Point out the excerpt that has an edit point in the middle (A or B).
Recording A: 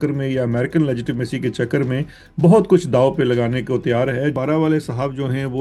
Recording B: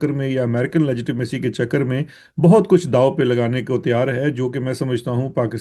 A